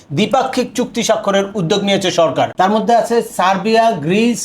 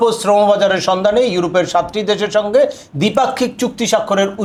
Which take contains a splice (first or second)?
first